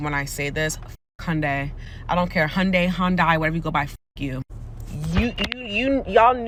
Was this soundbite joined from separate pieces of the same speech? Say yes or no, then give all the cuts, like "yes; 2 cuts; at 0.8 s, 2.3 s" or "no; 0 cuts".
no; 0 cuts